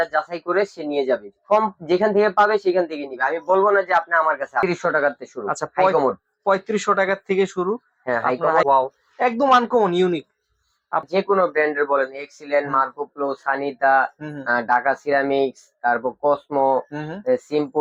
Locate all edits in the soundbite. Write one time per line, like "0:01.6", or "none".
0:04.6
0:08.6
0:11.1